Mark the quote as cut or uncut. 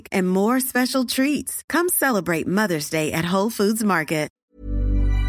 cut